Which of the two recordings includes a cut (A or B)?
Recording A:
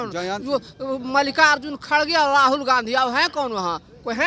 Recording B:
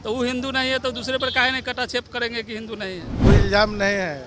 B